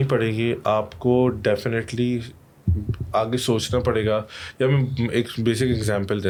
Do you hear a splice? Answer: no; 0 cuts

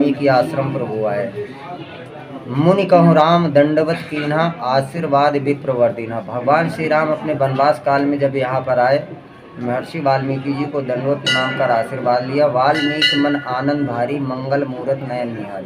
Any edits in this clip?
no; 0 cuts

